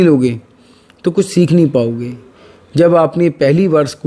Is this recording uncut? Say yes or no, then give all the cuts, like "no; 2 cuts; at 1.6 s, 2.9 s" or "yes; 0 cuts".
yes; 0 cuts